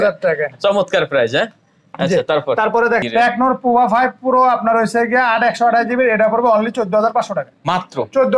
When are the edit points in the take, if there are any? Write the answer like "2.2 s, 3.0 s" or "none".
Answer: 3.0 s